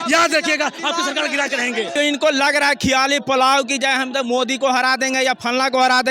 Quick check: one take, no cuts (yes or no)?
no